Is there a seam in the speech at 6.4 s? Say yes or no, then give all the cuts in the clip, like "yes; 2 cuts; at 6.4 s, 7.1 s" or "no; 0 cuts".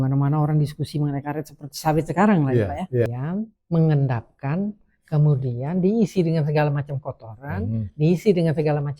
no; 1 cut; at 3.2 s